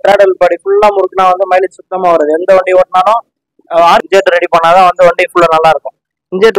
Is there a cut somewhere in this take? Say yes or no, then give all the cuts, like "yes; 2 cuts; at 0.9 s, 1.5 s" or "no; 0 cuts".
yes; 1 cut; at 4.0 s